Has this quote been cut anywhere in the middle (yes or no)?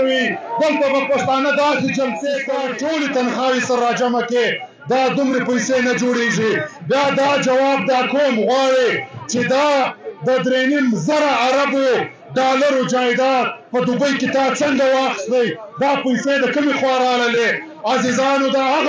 yes